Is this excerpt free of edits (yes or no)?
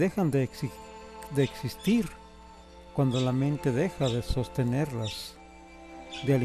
no